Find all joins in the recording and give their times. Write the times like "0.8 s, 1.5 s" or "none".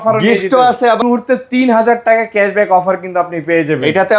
1.0 s